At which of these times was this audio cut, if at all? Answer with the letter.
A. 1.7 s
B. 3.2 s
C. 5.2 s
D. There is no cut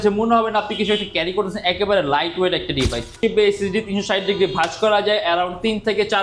B